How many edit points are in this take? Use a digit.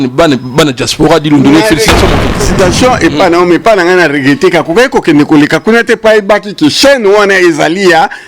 1